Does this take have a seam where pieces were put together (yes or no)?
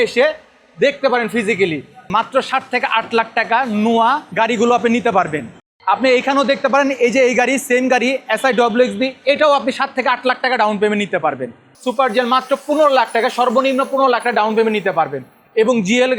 yes